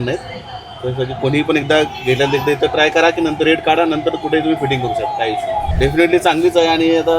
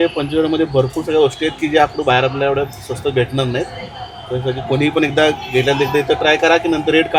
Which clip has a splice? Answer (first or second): first